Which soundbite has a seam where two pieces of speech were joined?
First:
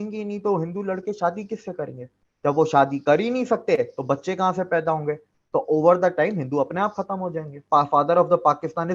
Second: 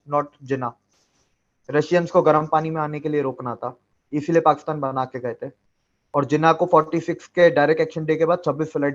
first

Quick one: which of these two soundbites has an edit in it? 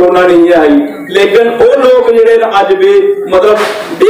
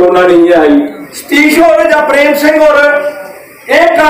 second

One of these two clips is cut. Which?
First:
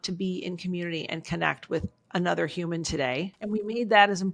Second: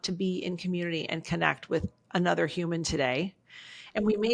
first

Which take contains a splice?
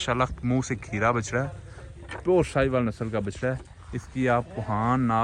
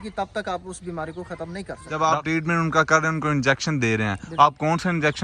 second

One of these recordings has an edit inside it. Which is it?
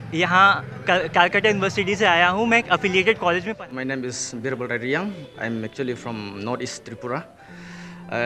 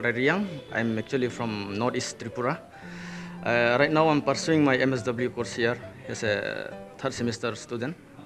first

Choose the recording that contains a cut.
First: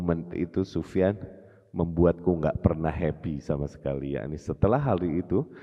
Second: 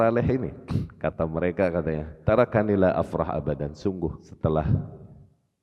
second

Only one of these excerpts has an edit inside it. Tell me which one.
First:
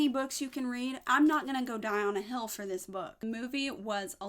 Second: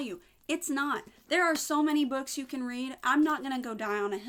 first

